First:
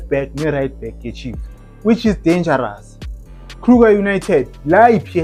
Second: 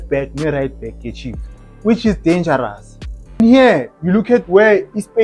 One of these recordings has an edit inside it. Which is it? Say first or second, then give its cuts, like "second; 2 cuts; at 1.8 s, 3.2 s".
second; 1 cut; at 3.4 s